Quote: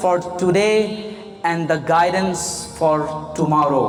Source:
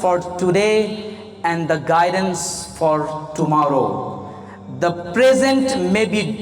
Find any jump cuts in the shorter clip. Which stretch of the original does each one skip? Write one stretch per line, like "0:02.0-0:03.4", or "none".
none

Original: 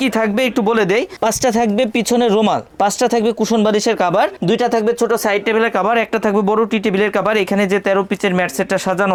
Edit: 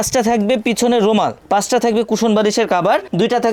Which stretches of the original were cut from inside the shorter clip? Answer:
none

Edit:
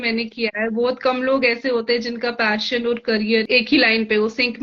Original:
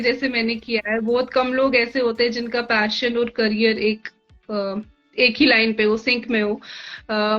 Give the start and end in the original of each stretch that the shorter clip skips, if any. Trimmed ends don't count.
0:03.8-0:05.1

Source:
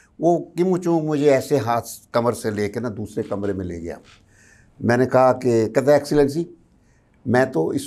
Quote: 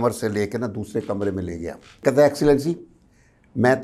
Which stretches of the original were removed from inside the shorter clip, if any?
0:04.2-0:05.7

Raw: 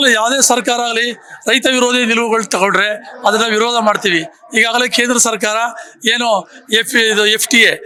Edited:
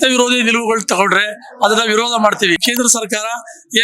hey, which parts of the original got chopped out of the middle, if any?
0:04.2-0:04.9

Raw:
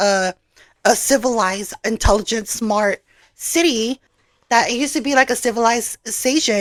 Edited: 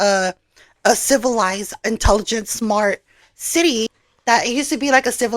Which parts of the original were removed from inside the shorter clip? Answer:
0:04.0-0:04.3

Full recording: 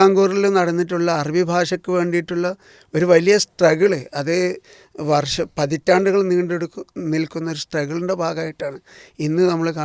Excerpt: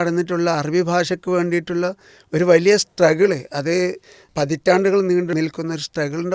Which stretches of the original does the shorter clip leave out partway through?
0:04.9-0:05.5
0:06.5-0:07.1

